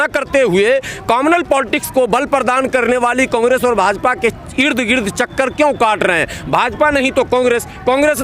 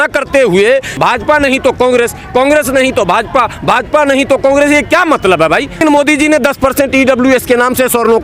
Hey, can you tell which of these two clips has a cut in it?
second; 2 cuts; at 0.9 s, 5.8 s

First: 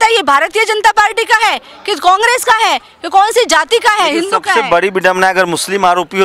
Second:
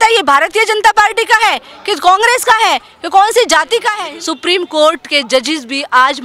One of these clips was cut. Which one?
second; 1 cut; at 4.0 s

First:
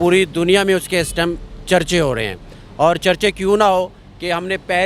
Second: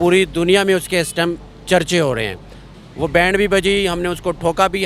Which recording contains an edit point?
second; 1 cut; at 2.6 s

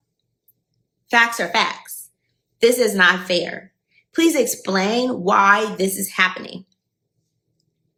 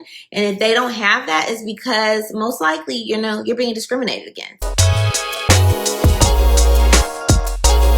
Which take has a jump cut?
second; 1 cut; at 4.5 s

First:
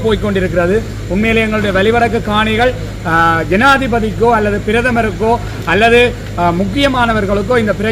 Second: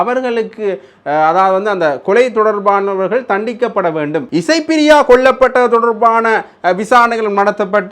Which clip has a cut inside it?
second; 1 cut; at 4.2 s

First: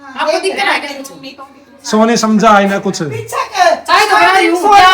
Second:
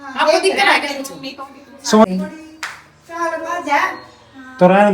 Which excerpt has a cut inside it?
second; 1 cut; at 2.0 s

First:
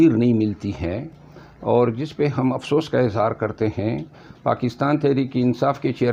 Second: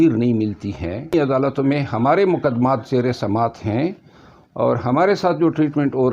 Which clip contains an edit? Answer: second; 1 cut; at 1.1 s

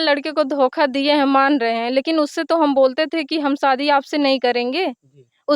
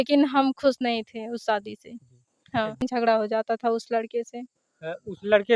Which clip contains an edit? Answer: second; 1 cut; at 2.8 s

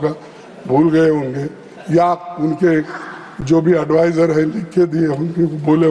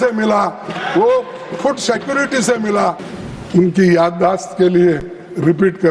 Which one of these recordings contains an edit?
second; 1 cut; at 3.1 s

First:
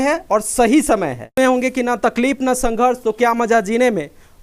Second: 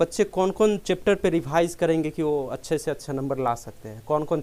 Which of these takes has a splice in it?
first; 1 cut; at 1.4 s

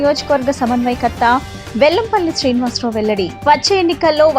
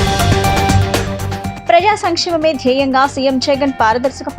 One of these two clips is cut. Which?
second; 1 cut; at 1.0 s

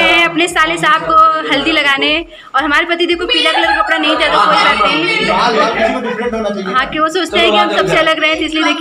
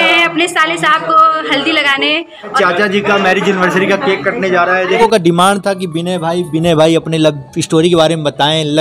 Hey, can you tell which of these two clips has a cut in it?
second; 2 cuts; at 2.5 s, 5.0 s

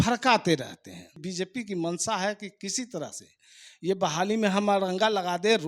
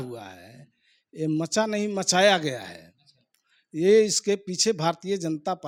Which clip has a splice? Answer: first; 1 cut; at 1.2 s

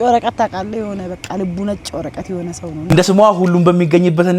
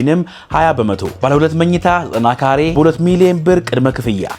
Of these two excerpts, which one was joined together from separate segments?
first; 1 cut; at 2.8 s

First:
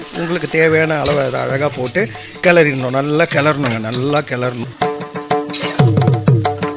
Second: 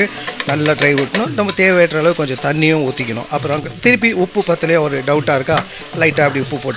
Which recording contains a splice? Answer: first; 1 cut; at 4.6 s

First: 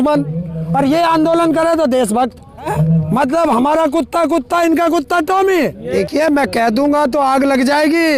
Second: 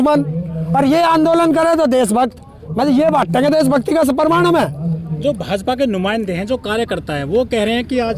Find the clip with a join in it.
first; 2 cuts; at 2.7 s, 5.8 s

